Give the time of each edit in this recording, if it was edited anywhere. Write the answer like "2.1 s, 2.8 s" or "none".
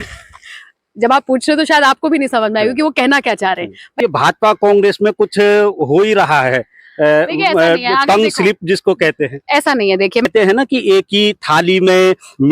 3.9 s, 10.3 s